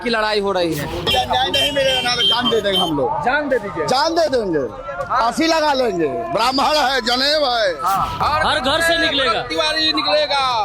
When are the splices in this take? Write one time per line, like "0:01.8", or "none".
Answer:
0:00.9
0:08.1